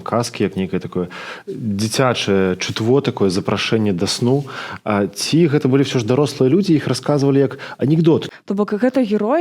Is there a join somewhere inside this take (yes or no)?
yes